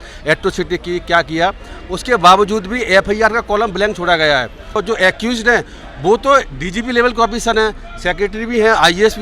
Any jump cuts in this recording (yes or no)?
yes